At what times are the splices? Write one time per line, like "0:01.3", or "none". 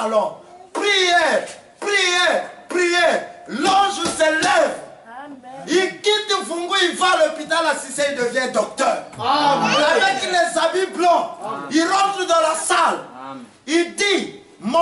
none